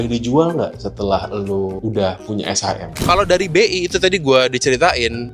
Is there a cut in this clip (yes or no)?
yes